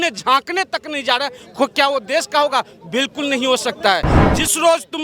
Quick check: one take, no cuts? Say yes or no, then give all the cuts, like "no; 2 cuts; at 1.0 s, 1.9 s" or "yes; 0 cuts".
no; 1 cut; at 4.1 s